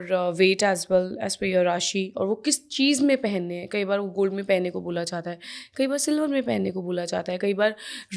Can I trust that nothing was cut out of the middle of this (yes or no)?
yes